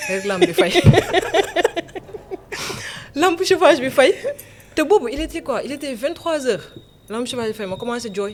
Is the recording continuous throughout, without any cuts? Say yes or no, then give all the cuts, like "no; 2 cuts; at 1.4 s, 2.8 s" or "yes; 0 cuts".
yes; 0 cuts